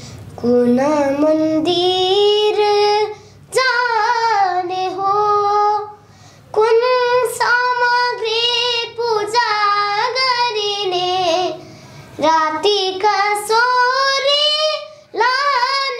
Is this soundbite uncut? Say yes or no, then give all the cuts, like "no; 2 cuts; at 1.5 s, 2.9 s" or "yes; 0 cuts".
yes; 0 cuts